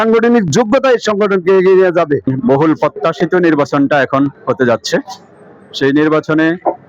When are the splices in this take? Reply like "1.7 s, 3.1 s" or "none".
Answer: 2.3 s

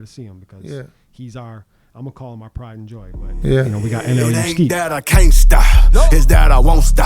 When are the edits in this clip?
4.7 s

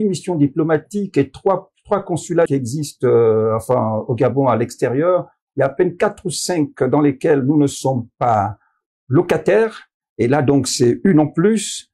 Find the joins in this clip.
2.5 s

